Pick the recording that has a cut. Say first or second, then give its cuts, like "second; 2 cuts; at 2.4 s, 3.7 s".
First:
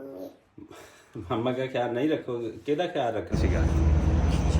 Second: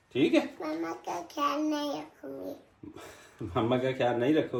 first; 1 cut; at 3.3 s